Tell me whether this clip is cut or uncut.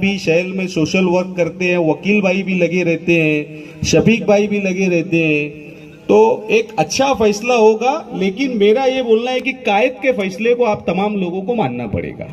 uncut